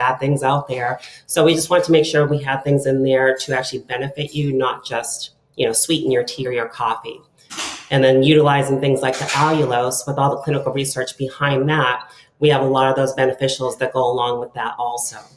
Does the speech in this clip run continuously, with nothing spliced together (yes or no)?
yes